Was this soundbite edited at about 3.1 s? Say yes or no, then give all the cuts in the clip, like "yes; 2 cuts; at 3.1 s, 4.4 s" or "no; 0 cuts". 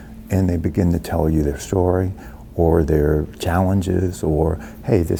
no; 0 cuts